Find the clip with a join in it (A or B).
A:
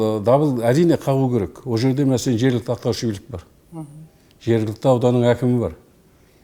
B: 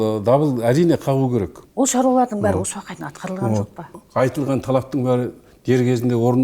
B